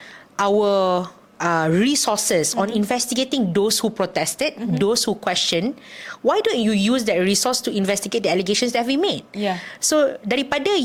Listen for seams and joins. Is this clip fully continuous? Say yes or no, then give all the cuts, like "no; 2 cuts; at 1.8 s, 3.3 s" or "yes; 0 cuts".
yes; 0 cuts